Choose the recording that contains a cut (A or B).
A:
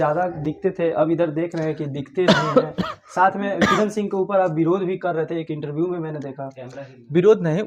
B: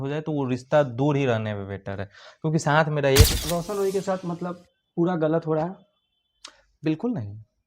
B